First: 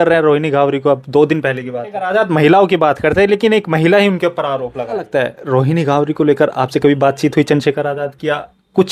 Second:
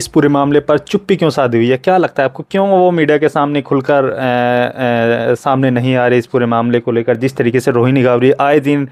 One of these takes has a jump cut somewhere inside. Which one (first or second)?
first